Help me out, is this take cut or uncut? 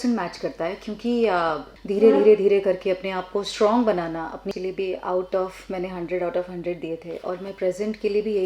cut